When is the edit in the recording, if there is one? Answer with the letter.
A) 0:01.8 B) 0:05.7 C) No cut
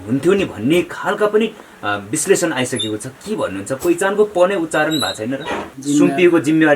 B